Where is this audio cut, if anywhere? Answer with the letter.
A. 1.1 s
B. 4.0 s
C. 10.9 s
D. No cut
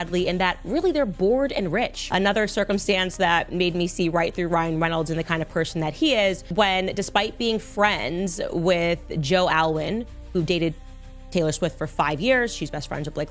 D